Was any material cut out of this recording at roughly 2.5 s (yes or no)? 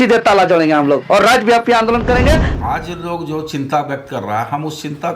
yes